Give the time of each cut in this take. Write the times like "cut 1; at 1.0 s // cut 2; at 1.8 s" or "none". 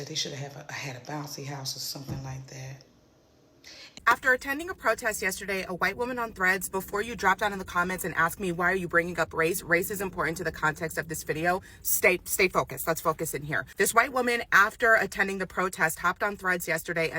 cut 1; at 3.8 s